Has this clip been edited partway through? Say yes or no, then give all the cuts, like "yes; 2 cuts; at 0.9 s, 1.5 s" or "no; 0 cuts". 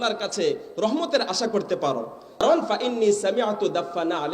yes; 1 cut; at 2.4 s